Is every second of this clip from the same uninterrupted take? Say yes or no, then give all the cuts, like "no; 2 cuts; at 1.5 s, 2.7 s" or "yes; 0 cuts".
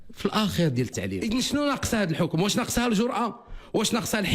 no; 1 cut; at 1.2 s